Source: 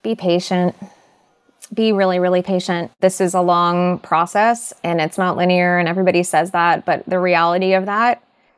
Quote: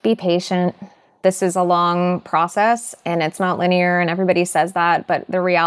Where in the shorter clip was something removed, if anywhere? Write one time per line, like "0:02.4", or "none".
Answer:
0:01.1